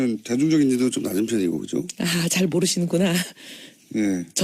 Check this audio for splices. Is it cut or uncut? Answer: cut